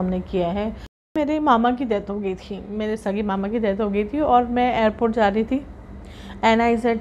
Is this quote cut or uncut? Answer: cut